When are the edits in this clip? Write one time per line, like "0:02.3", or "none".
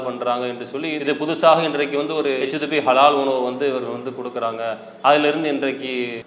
0:01.0

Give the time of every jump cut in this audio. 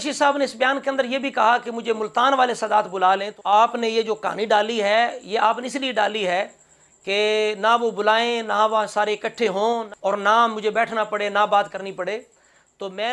0:03.3
0:09.8

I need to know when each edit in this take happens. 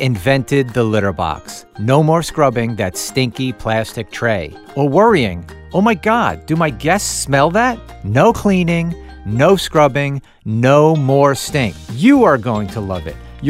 0:07.9
0:11.8

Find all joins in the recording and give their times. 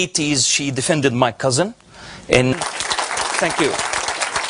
none

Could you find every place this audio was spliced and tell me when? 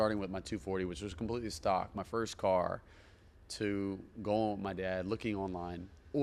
none

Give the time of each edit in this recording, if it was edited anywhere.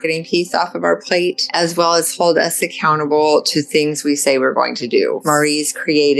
0:01.4
0:05.2

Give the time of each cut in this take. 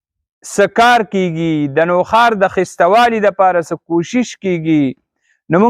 none

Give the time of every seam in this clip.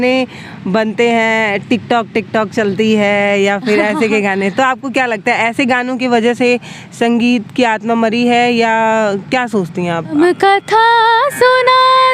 0:10.1

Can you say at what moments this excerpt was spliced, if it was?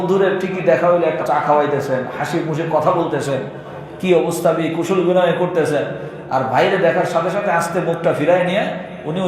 0:01.2

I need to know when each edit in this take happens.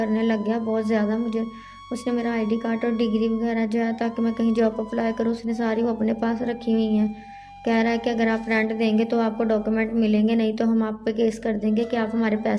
none

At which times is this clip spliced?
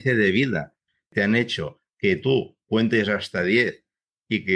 0:01.0
0:02.6

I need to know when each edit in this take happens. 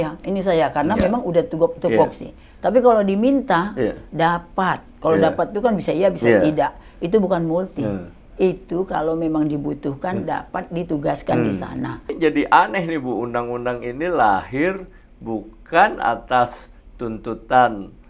0:12.2

